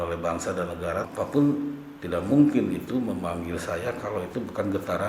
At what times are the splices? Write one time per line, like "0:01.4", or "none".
0:01.1